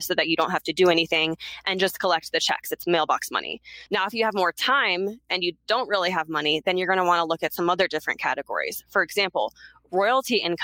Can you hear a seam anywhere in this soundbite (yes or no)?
yes